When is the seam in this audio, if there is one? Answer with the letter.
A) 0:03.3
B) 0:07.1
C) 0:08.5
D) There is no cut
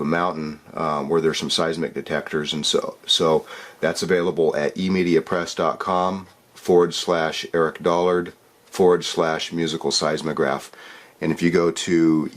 A